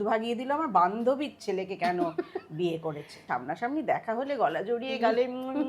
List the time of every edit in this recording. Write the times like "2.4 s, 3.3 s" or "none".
3.2 s